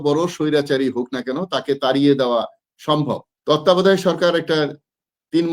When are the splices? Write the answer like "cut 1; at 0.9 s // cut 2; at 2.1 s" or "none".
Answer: cut 1; at 3.3 s